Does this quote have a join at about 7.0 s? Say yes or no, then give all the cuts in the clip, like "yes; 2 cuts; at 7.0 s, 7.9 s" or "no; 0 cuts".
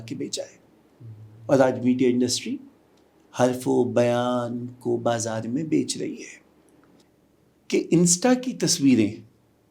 yes; 1 cut; at 7.0 s